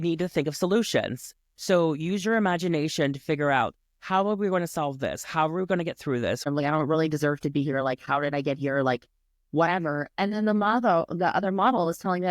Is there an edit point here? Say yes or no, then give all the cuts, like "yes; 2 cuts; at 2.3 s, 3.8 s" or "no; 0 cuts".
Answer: yes; 1 cut; at 6.5 s